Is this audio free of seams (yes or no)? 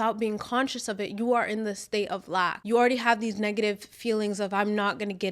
no